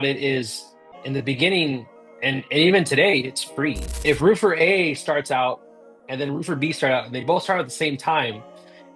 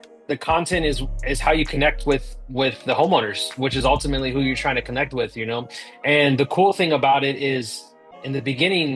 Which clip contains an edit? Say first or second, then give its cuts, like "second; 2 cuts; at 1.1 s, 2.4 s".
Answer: first; 1 cut; at 3.9 s